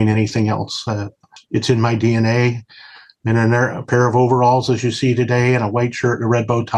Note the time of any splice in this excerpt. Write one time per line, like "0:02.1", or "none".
0:01.3